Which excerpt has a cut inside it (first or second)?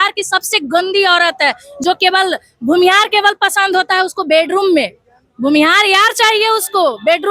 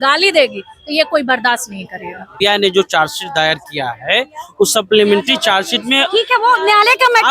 second